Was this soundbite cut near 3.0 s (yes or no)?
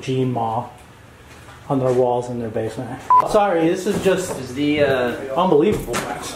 yes